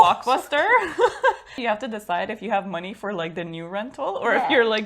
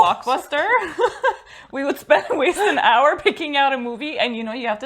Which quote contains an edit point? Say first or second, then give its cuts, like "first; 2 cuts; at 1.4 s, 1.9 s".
first; 1 cut; at 1.5 s